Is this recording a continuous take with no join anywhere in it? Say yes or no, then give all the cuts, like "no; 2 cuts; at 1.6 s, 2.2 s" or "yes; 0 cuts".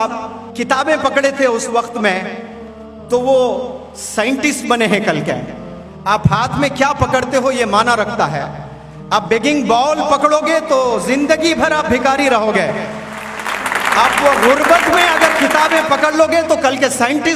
yes; 0 cuts